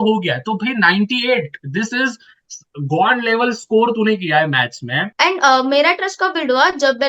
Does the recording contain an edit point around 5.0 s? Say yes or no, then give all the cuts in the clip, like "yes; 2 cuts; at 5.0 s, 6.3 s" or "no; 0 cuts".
yes; 1 cut; at 5.0 s